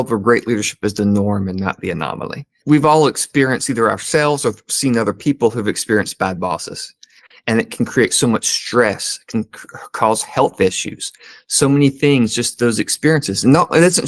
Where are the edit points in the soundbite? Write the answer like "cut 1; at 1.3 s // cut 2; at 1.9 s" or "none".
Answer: cut 1; at 2.6 s